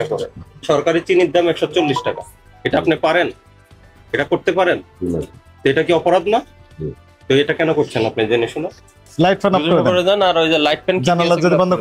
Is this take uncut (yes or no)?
no